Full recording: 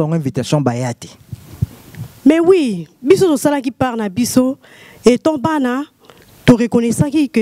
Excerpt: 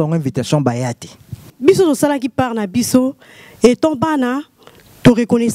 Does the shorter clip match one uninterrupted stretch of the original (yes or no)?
no